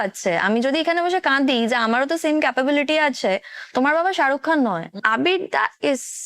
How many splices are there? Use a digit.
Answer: 1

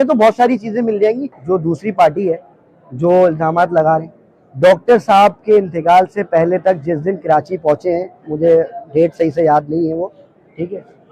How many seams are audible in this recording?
1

